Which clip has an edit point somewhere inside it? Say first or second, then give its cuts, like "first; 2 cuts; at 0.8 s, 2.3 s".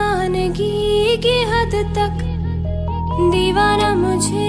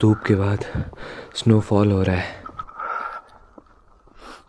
second; 1 cut; at 2.4 s